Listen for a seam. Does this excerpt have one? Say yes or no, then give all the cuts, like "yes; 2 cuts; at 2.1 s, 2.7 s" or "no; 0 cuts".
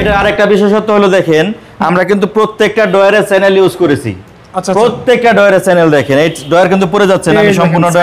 no; 0 cuts